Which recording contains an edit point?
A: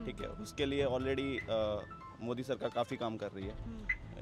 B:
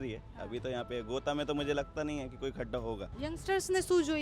B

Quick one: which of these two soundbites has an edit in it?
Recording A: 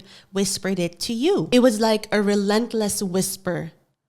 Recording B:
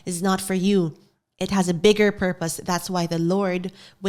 A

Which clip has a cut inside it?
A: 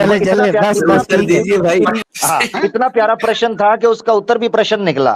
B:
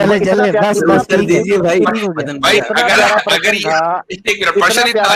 A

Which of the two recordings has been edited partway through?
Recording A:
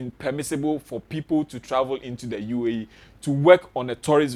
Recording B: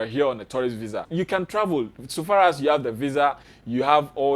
B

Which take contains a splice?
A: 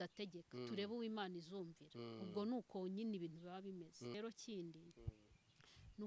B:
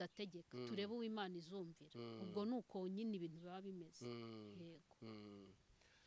A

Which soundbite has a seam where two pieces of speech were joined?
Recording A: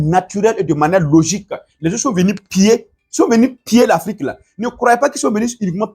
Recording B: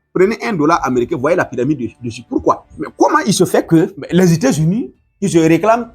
B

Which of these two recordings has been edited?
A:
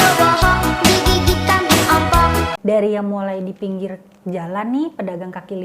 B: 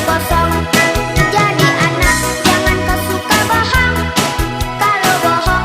A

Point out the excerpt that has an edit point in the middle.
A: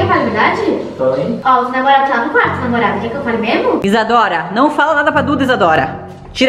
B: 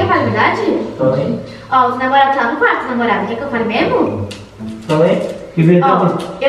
A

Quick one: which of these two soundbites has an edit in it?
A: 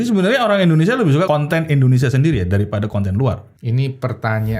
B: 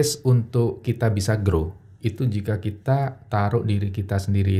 A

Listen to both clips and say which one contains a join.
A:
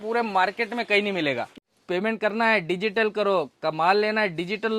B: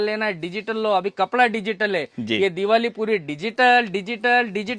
A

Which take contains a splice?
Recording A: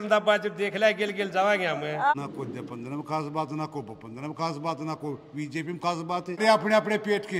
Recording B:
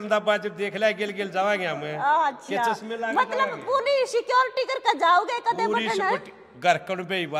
A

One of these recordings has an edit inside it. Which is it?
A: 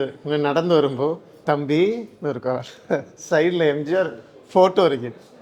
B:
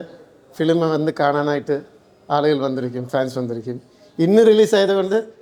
A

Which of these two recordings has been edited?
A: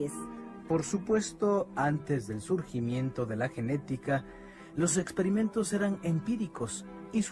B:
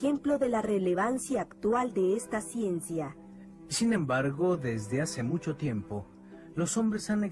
B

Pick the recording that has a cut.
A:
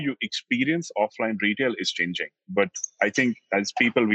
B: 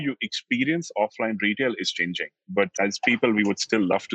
B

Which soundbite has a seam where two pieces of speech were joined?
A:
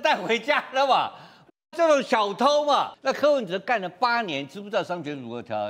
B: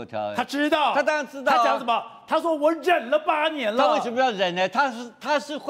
A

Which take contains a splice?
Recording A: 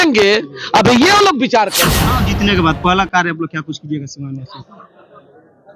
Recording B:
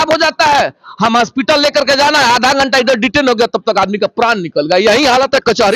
A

